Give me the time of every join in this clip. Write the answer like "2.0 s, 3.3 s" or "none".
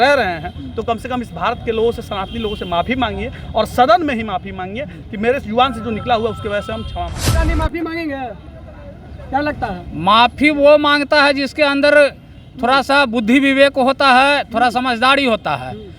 7.5 s